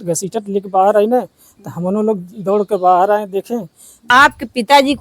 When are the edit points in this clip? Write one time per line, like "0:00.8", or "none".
0:04.0